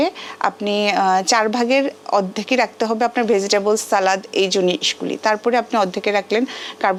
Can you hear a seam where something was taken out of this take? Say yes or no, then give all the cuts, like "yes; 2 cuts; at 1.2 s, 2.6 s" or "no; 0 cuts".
no; 0 cuts